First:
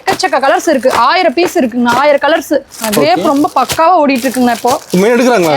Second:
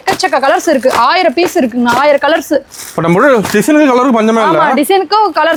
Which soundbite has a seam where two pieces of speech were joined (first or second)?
first